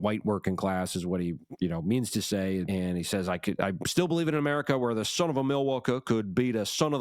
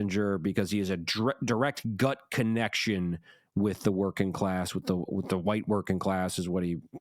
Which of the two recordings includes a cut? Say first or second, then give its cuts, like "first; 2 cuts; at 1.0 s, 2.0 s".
first; 1 cut; at 2.7 s